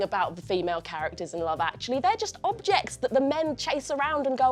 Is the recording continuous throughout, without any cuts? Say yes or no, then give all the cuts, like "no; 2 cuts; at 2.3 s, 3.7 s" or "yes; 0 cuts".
yes; 0 cuts